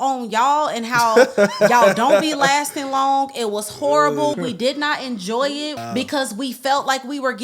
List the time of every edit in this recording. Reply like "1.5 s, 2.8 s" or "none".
4.4 s, 5.8 s

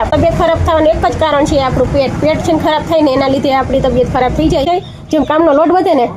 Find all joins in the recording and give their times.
4.7 s

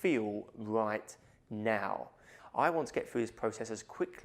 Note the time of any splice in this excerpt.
2.4 s

